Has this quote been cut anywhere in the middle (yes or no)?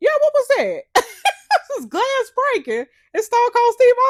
no